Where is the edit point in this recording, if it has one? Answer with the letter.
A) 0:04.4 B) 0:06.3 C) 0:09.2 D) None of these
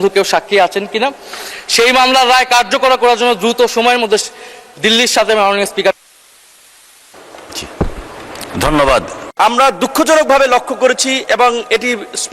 C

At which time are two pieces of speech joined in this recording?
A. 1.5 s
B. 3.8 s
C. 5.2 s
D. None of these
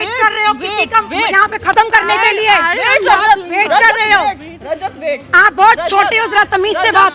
D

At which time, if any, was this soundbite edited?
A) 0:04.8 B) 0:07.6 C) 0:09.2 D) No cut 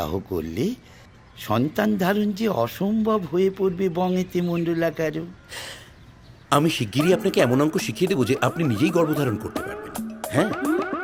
D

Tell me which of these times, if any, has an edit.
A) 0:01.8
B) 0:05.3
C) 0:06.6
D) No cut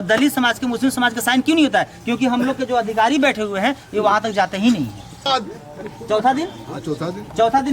B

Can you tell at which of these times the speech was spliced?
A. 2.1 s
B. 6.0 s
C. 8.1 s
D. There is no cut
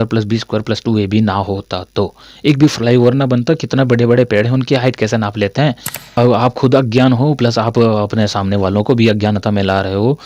B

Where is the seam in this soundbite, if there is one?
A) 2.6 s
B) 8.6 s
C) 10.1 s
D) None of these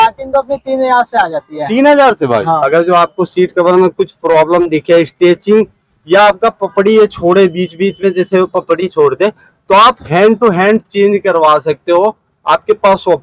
A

